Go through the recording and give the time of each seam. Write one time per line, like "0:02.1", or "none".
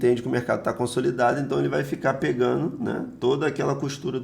none